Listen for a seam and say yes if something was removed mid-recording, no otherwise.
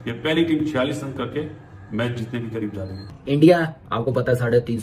yes